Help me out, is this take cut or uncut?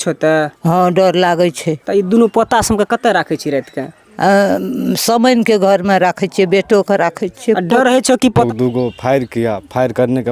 cut